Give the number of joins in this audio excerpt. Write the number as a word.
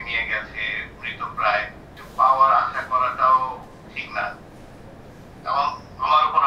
one